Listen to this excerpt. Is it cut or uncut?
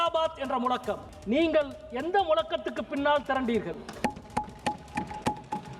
cut